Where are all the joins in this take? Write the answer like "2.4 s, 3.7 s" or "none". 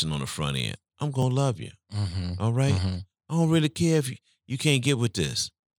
none